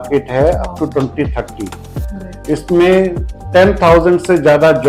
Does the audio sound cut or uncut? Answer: uncut